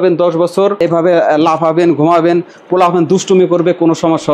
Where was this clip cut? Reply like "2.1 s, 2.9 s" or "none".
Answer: none